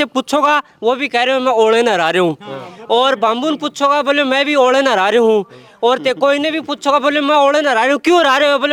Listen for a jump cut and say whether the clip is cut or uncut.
uncut